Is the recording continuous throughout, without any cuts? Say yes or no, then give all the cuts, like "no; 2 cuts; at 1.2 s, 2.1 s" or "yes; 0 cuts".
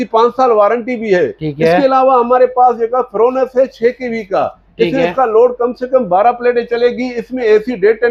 yes; 0 cuts